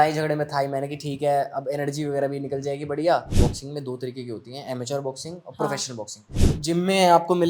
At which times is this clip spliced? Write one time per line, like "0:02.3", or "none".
0:03.3
0:06.4

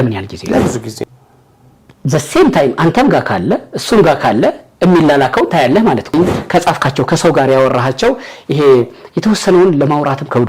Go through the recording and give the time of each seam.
0:01.0
0:06.1

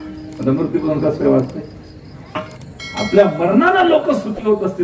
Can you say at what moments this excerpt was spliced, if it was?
0:02.5

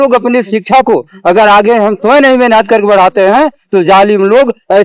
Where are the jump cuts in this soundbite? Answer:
none

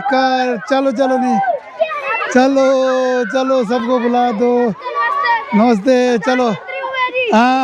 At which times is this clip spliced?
none

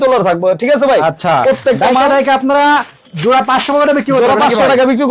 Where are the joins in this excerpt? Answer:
none

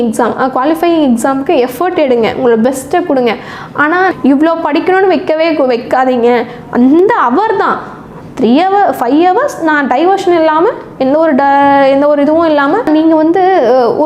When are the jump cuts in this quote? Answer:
0:04.1
0:12.9

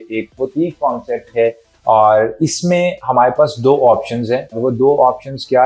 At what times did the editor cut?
none

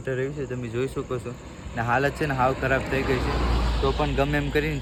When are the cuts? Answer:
none

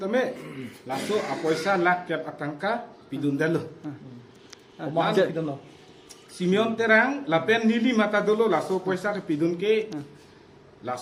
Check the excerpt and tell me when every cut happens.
none

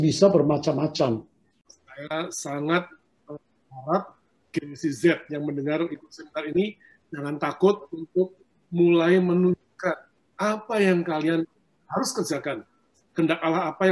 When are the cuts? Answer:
0:01.5

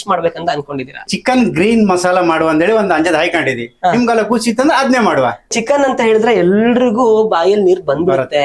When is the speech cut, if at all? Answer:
0:05.5

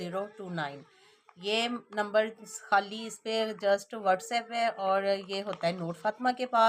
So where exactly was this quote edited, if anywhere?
none

